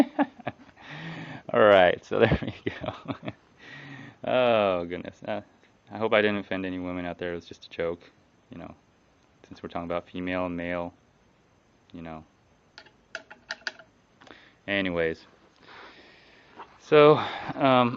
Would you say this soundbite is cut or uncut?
uncut